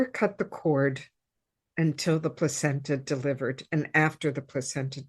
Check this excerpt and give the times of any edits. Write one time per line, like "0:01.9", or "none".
none